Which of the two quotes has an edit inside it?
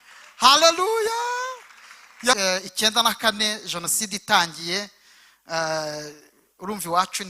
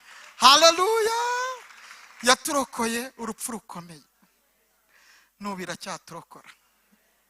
first; 1 cut; at 2.4 s

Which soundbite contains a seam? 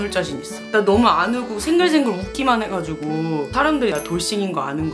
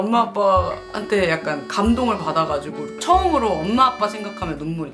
first; 1 cut; at 3.9 s

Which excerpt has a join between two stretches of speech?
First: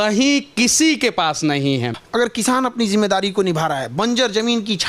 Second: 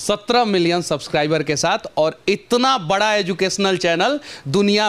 first; 1 cut; at 2.0 s

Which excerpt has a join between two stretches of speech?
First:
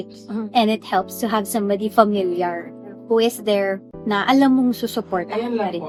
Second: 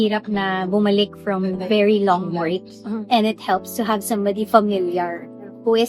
second; 1 cut; at 1.6 s

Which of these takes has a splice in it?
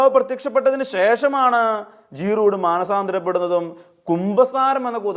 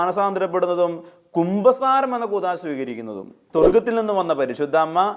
second; 1 cut; at 3.4 s

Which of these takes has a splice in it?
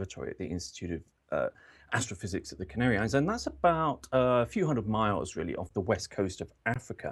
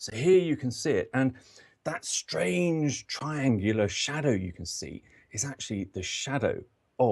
second; 1 cut; at 5.8 s

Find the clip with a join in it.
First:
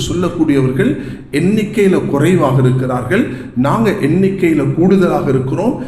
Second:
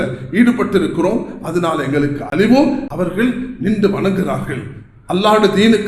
second; 1 cut; at 2.8 s

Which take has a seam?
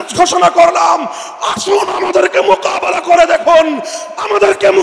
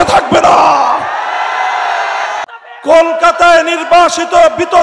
second; 1 cut; at 2.5 s

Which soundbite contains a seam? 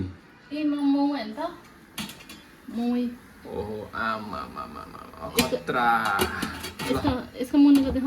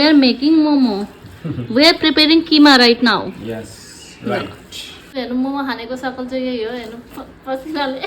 second; 1 cut; at 5.1 s

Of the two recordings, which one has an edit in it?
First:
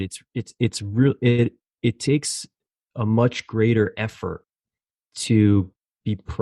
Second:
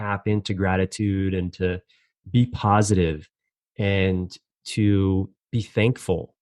second; 1 cut; at 5.4 s

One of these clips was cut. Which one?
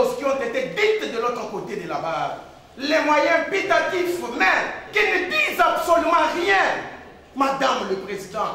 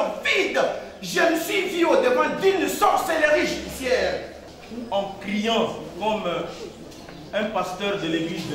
second; 1 cut; at 4.4 s

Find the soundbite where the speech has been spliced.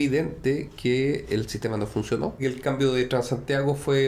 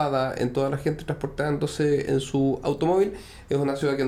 first; 1 cut; at 2.4 s

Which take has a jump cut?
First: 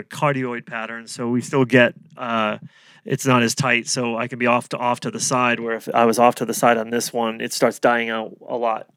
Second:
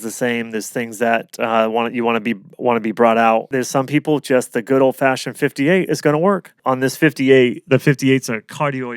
second; 2 cuts; at 3.5 s, 6.5 s

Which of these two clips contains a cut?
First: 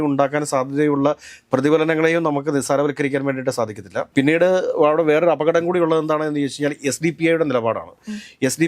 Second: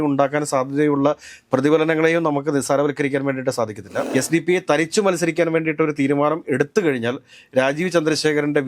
second; 1 cut; at 4.0 s

